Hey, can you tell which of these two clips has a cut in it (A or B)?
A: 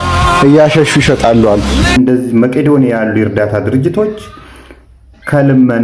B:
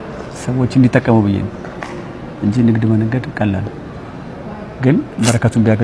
A